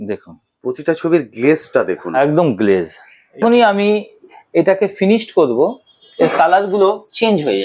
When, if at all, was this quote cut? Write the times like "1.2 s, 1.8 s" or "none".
3.4 s